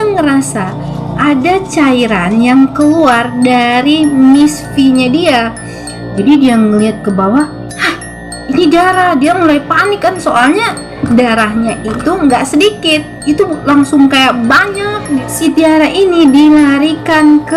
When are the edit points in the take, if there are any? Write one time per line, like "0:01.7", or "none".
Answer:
0:15.3